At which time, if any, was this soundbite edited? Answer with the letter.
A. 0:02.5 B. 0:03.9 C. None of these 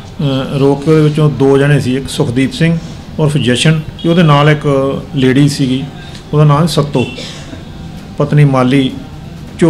B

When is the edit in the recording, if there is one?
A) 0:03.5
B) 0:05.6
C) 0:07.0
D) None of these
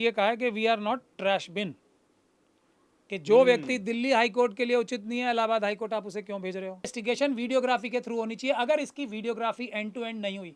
C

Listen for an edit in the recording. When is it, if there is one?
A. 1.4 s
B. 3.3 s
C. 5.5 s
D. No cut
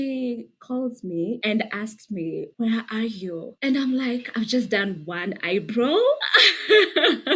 A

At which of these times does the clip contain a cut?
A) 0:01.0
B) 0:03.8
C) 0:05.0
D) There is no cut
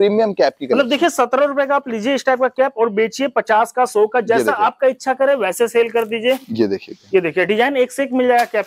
D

